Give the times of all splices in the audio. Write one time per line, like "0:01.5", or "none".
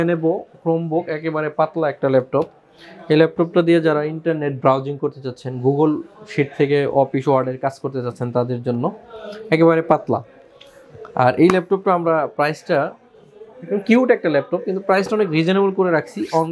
none